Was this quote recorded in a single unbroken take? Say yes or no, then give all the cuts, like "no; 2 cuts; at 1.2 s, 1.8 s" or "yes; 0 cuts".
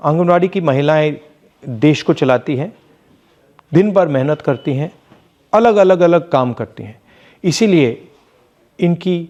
yes; 0 cuts